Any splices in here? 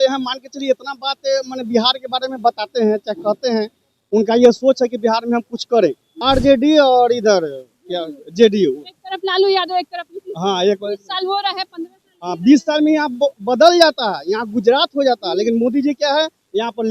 yes; 1 cut; at 6.1 s

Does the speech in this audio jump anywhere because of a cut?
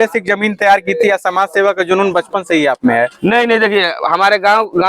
no; 0 cuts

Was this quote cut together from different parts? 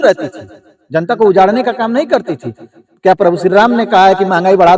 no; 0 cuts

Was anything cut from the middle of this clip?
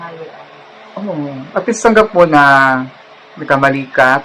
no; 0 cuts

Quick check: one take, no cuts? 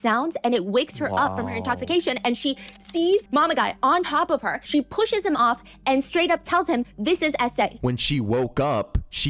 no; 3 cuts; at 3.3 s, 4.6 s, 7.8 s

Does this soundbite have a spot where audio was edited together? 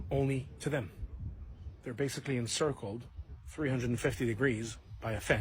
no; 0 cuts

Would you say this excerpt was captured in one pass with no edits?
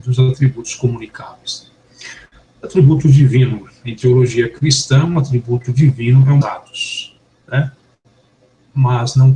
yes; 0 cuts

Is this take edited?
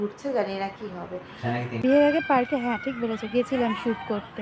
yes; 1 cut; at 1.8 s

